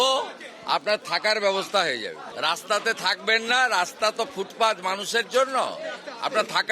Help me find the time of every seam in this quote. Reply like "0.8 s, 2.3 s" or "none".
2.3 s